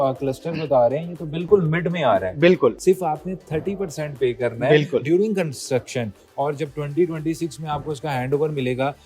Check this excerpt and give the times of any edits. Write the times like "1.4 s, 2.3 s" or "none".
2.8 s